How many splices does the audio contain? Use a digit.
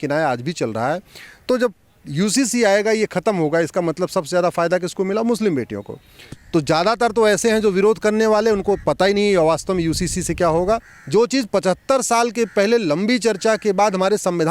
2